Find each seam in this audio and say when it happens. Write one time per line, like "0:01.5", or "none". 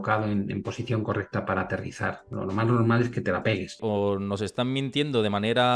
0:03.8